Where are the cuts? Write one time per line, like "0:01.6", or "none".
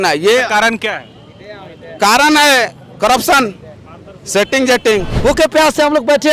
0:05.1